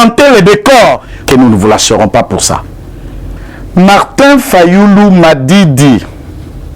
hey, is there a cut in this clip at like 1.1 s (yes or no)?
yes